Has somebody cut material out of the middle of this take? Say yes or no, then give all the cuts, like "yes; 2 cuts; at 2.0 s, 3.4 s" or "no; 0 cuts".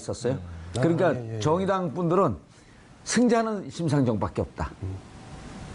yes; 1 cut; at 1.3 s